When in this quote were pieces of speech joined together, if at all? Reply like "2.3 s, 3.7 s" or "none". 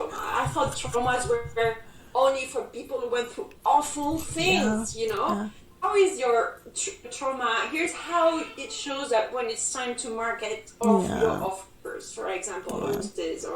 5.6 s